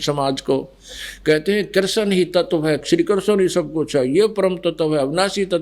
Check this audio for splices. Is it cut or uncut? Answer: cut